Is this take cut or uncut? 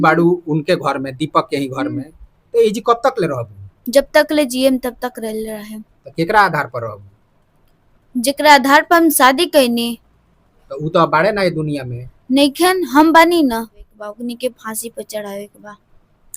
cut